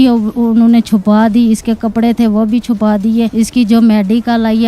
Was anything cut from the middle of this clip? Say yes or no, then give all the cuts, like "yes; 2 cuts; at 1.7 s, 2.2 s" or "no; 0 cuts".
yes; 1 cut; at 3.3 s